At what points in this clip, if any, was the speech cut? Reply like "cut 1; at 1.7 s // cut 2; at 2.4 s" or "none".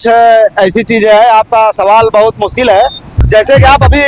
cut 1; at 3.1 s